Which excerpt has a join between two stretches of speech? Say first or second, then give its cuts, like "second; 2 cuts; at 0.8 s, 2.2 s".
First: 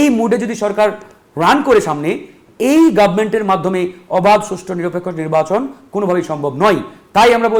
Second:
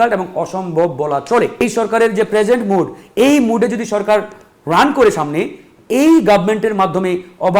second; 1 cut; at 1.6 s